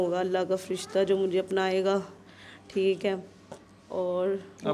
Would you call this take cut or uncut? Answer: uncut